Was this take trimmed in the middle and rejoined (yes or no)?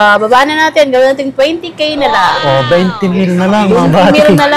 no